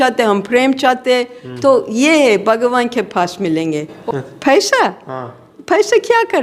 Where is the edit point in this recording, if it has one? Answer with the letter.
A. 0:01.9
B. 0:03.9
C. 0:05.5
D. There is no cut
B